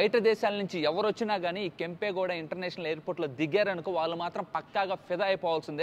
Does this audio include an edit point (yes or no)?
no